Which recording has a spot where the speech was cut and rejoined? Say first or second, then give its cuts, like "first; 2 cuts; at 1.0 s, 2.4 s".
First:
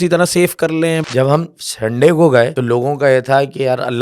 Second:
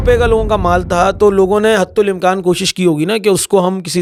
first; 2 cuts; at 1.0 s, 2.6 s